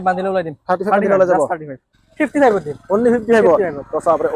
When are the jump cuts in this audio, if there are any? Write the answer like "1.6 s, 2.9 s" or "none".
2.0 s